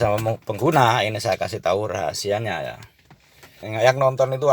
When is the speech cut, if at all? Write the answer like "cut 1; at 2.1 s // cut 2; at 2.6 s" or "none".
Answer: cut 1; at 3.6 s

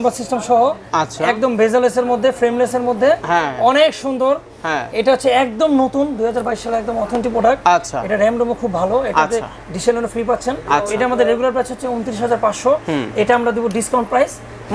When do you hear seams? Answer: none

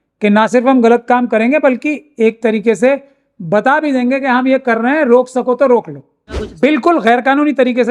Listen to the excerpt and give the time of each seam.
cut 1; at 6.4 s

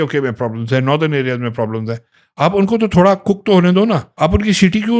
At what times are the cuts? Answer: cut 1; at 4.1 s

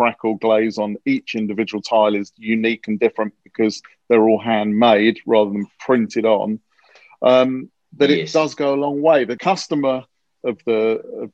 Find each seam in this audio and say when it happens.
cut 1; at 9.4 s

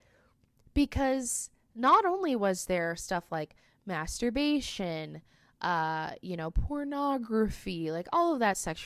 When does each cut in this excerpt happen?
none

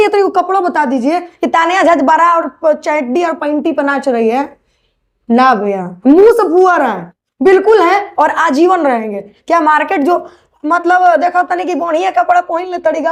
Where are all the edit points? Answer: none

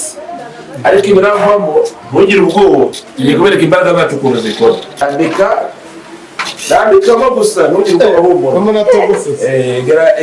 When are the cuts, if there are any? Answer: cut 1; at 5.0 s

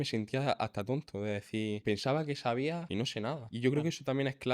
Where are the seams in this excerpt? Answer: cut 1; at 1.8 s // cut 2; at 3.1 s

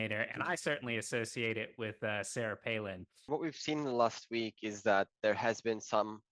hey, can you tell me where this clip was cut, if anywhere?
cut 1; at 3.2 s

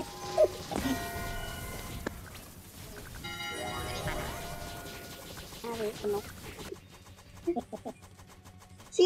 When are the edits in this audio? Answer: cut 1; at 6.7 s

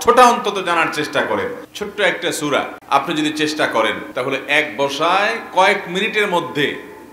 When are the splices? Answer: cut 1; at 1.7 s // cut 2; at 2.8 s // cut 3; at 4.0 s

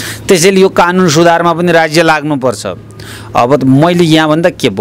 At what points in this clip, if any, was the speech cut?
none

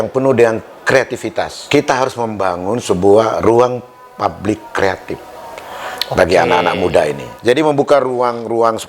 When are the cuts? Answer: cut 1; at 1.6 s // cut 2; at 7.3 s

